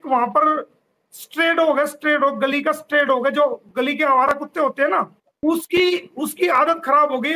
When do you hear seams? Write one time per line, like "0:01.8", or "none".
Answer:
0:05.2